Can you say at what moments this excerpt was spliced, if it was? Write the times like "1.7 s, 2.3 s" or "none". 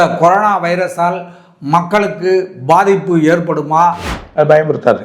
4.1 s